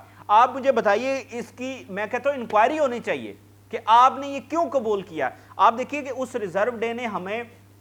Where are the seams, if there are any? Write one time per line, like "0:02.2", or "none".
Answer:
none